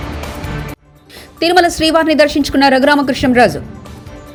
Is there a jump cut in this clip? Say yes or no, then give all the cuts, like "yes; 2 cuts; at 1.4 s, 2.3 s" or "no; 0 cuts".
no; 0 cuts